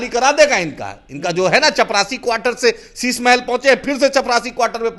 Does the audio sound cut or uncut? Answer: uncut